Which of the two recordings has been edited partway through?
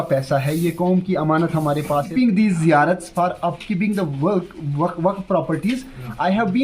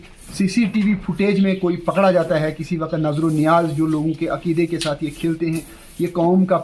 first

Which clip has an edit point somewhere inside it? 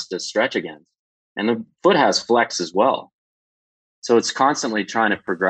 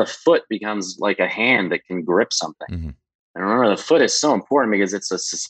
first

